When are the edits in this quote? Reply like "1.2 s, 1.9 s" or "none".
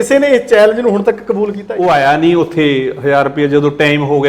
1.6 s